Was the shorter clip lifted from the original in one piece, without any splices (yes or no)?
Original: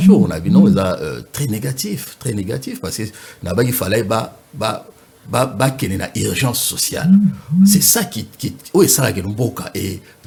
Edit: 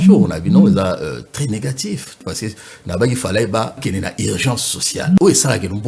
no